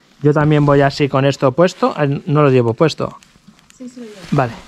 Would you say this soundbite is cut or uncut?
uncut